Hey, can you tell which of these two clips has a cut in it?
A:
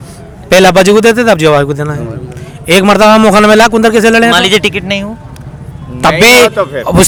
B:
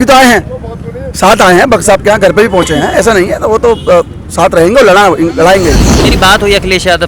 B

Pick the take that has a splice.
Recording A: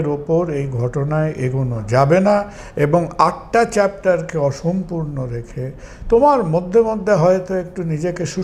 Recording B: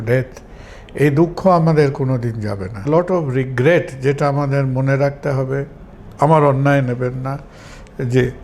B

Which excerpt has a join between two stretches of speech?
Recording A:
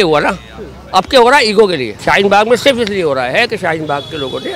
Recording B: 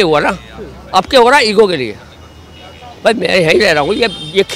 A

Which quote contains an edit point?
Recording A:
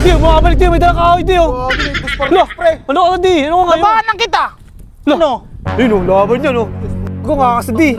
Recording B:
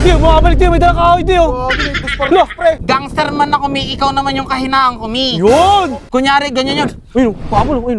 B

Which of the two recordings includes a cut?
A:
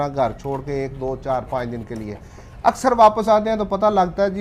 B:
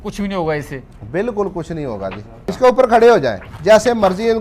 B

